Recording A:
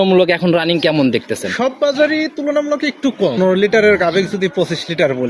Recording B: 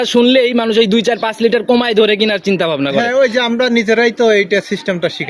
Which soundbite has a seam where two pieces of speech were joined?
A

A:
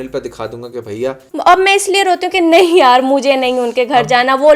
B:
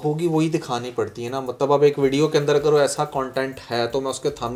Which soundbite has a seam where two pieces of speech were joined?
A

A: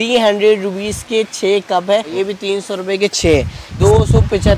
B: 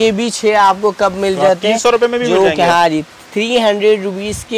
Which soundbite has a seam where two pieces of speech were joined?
A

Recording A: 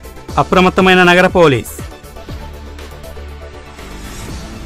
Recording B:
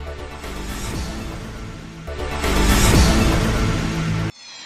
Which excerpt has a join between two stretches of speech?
A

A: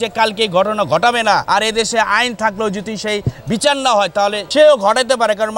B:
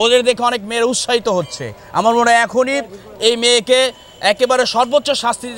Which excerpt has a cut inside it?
A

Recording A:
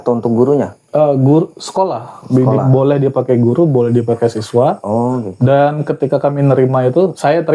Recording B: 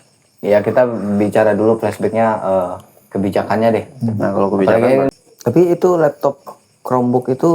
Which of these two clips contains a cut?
B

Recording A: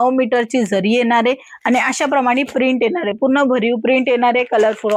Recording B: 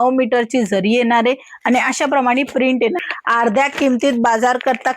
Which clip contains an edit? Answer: B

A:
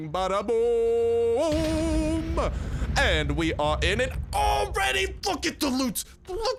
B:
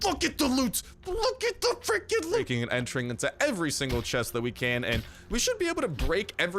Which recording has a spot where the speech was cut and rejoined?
B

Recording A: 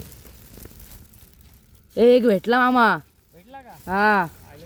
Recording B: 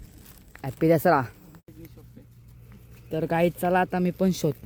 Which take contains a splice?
B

